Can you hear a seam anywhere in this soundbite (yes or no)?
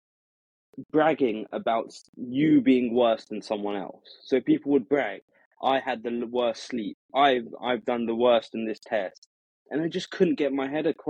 no